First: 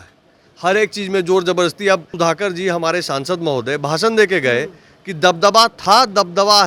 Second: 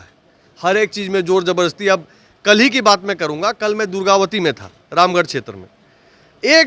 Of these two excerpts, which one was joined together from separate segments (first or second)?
first